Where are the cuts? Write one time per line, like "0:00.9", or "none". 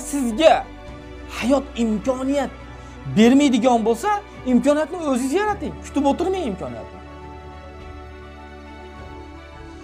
none